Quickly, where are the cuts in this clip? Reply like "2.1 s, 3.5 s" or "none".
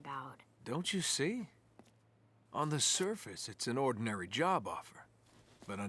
none